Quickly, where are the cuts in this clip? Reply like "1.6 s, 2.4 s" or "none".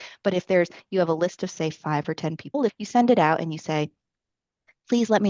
2.8 s

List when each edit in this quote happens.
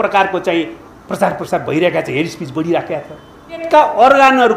none

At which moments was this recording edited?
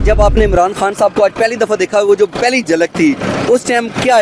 none

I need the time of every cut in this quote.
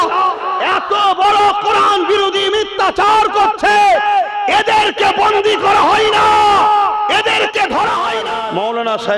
8.2 s

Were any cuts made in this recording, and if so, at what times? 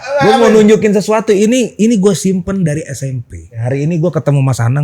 3.6 s

